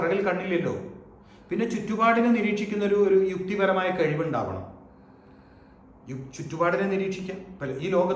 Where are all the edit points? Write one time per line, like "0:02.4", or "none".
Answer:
none